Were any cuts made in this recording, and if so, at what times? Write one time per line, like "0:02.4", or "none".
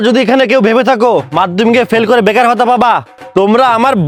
none